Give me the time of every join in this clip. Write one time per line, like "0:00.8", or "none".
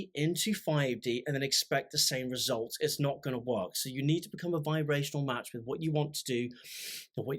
none